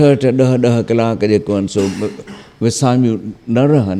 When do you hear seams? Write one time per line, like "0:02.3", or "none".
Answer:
none